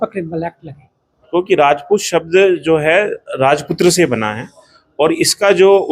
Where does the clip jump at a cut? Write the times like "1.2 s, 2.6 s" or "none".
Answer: 1.3 s